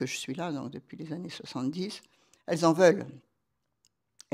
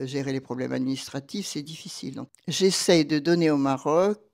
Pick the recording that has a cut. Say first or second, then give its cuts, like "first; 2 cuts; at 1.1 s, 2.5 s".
second; 1 cut; at 2.3 s